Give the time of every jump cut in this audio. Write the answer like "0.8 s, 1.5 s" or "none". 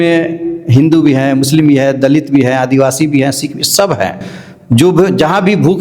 none